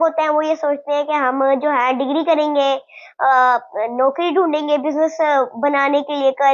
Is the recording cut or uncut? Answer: uncut